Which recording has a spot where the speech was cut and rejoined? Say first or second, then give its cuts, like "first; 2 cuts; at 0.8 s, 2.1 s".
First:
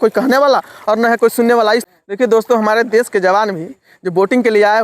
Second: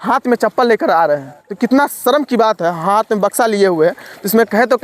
first; 1 cut; at 1.9 s